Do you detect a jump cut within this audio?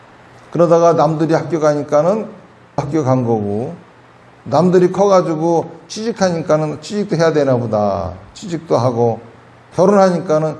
yes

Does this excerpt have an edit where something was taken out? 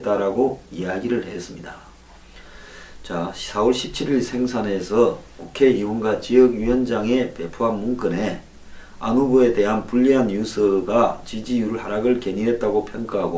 no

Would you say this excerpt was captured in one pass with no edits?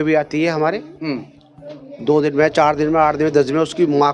yes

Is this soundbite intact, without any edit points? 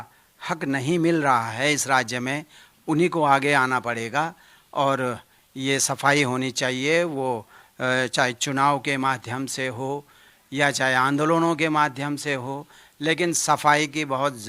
yes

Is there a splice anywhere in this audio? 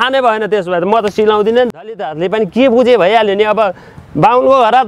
yes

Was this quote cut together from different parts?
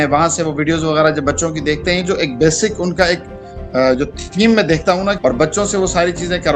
yes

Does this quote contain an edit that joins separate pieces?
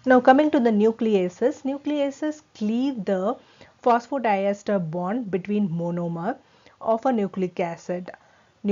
no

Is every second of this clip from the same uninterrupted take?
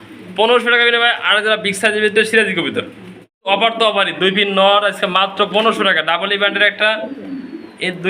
no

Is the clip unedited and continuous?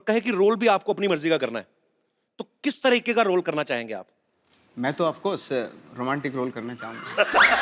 yes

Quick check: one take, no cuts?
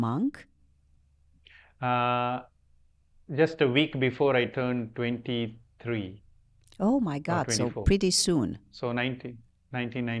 yes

